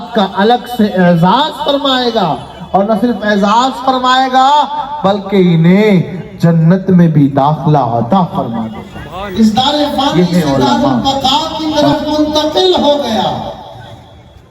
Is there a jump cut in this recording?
yes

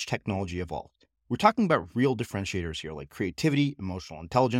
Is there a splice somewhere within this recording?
no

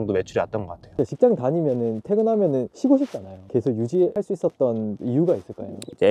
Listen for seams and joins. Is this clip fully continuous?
no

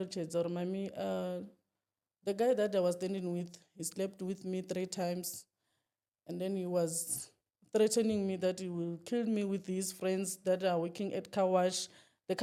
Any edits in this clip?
no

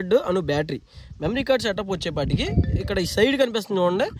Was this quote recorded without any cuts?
yes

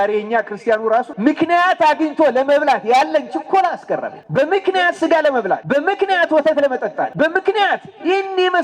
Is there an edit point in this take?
yes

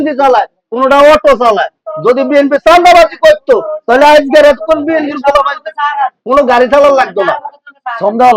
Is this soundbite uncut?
yes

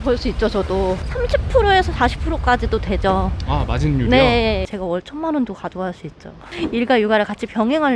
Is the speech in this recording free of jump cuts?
no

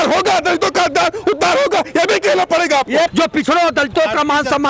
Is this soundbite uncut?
no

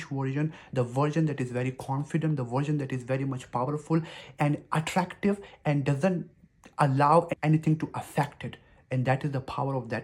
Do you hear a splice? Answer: yes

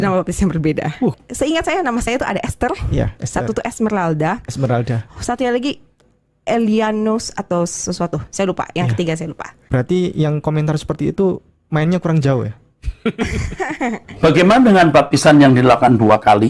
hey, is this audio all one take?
no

